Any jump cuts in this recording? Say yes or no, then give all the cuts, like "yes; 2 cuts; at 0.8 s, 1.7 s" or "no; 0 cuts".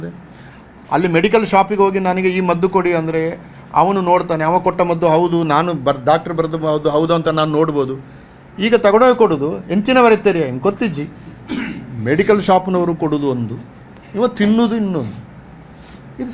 no; 0 cuts